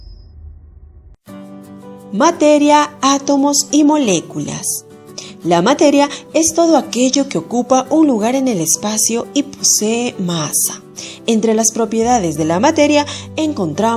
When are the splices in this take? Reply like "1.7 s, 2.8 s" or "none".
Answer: 1.0 s